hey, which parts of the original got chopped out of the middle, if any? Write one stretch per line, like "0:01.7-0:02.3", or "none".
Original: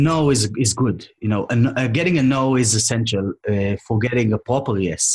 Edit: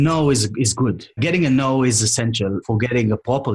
0:01.2-0:01.9
0:03.3-0:03.8